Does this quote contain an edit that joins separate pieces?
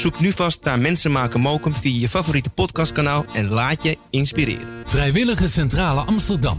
no; 0 cuts

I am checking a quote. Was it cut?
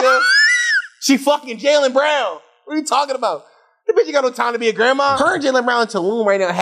yes; 1 cut; at 5.2 s

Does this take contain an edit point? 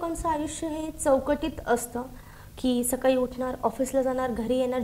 no; 0 cuts

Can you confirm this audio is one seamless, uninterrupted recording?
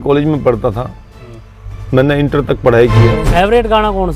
no; 1 cut; at 3.2 s

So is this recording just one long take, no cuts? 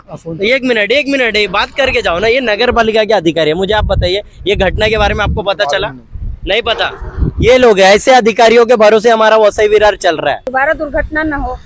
no; 1 cut; at 10.5 s

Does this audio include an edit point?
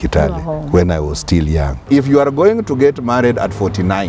yes; 1 cut; at 1.8 s

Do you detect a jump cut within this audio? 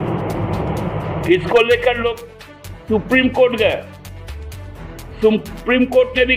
no; 0 cuts

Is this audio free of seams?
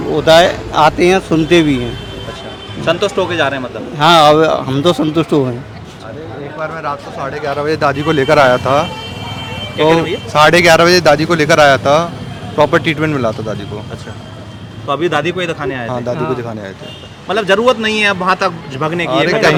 yes; 0 cuts

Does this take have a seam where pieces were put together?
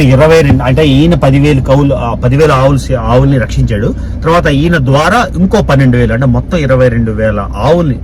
no; 0 cuts

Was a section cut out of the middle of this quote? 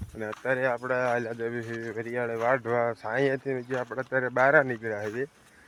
no; 0 cuts

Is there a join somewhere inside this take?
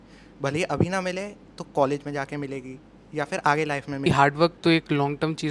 yes; 1 cut; at 4.1 s

